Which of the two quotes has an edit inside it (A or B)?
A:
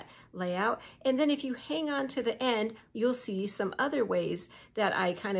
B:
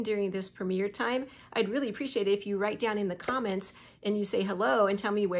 A